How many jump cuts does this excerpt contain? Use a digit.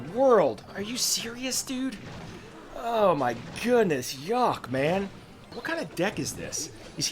1